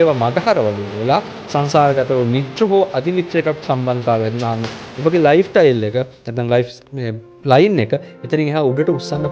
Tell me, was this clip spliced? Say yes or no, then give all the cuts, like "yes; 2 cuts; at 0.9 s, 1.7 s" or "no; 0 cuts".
no; 0 cuts